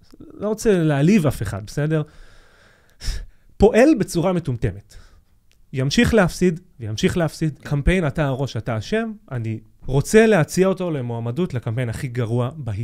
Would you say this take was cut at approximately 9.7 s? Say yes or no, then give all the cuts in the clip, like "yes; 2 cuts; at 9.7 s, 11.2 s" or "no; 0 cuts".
yes; 2 cuts; at 7.6 s, 9.7 s